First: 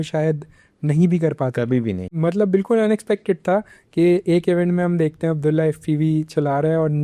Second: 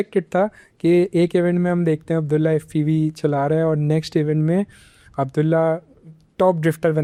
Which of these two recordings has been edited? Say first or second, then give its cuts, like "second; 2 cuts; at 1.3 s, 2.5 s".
first; 1 cut; at 2.1 s